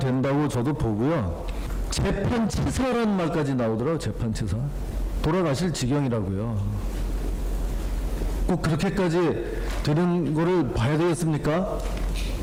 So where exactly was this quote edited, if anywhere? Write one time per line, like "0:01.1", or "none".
none